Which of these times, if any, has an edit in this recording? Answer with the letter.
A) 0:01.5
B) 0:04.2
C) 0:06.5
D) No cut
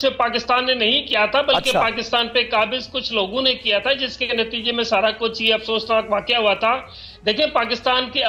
D